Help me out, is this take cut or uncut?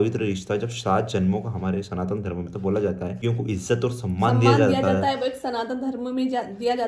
cut